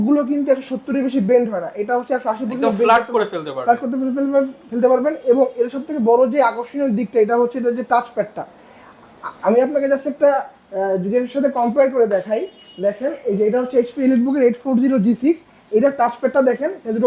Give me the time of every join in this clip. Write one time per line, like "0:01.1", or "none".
none